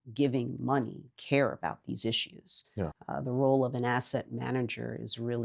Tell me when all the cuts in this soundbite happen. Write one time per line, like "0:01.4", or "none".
0:03.0